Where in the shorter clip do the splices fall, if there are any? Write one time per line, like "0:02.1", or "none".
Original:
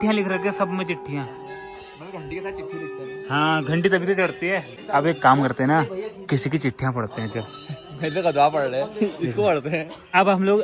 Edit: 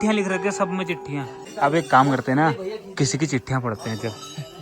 0:01.4